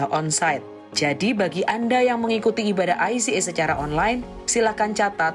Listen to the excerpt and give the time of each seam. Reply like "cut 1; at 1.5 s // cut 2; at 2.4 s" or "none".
none